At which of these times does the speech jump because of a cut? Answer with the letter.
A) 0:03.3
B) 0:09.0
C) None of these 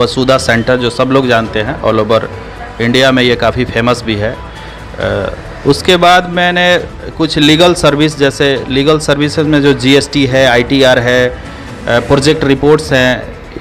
C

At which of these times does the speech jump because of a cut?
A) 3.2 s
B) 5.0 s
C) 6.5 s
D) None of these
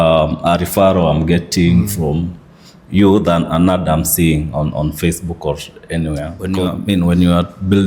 C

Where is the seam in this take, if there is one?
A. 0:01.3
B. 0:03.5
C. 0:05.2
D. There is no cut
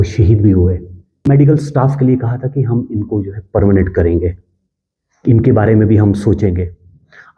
A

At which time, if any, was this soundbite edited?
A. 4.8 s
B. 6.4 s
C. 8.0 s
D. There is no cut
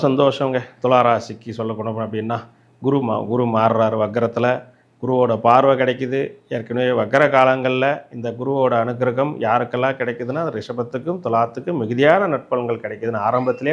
D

